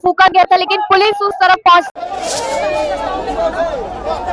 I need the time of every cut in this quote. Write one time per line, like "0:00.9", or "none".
0:01.9